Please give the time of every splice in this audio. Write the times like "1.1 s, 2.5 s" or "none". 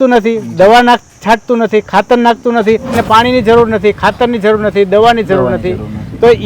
3.0 s